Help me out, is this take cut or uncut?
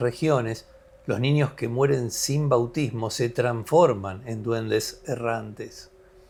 uncut